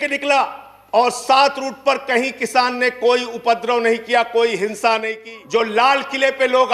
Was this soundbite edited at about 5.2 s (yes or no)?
yes